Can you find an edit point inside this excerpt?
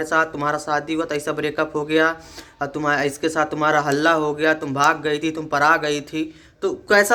no; 0 cuts

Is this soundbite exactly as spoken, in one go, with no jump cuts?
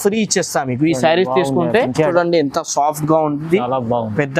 no; 1 cut; at 2.1 s

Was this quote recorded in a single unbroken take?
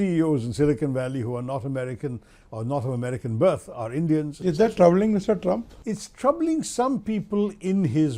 no; 1 cut; at 5.7 s

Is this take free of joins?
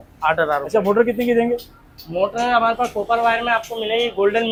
yes; 0 cuts

